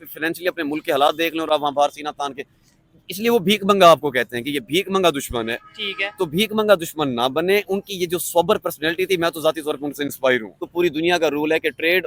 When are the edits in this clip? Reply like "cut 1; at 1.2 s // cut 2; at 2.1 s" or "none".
cut 1; at 10.6 s